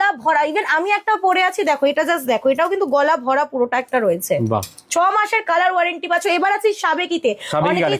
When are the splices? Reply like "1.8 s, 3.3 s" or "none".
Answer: none